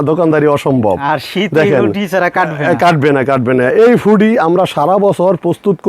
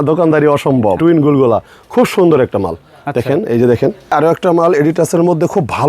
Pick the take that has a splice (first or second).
second